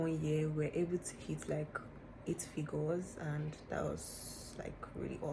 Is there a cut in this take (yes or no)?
no